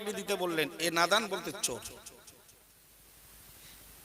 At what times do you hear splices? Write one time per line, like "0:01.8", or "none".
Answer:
0:02.8